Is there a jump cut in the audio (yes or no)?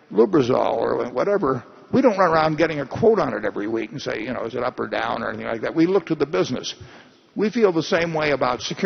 no